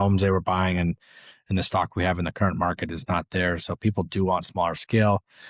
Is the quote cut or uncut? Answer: uncut